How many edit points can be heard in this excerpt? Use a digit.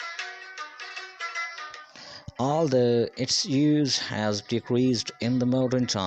1